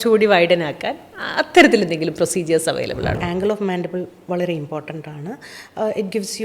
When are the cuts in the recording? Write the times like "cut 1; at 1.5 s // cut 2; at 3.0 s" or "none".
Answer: cut 1; at 3.2 s